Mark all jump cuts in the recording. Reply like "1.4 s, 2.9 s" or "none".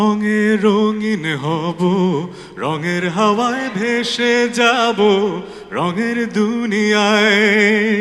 none